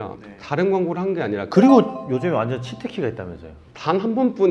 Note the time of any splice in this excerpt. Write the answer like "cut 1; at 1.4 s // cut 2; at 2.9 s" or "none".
cut 1; at 1.5 s